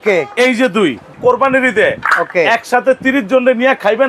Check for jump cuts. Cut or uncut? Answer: cut